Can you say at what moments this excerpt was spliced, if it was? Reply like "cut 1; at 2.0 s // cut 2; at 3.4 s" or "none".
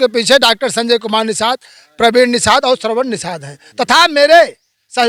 none